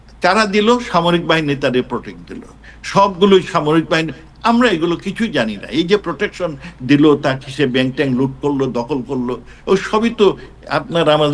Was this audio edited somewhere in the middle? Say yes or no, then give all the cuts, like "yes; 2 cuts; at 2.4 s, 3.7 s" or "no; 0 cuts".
no; 0 cuts